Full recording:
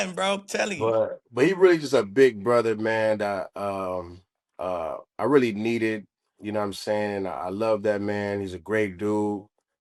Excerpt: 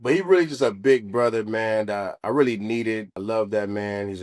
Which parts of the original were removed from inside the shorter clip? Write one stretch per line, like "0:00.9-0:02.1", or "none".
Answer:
0:03.5-0:05.1
0:06.1-0:07.5